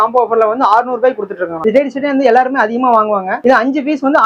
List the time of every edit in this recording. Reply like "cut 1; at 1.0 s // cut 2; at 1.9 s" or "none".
cut 1; at 1.5 s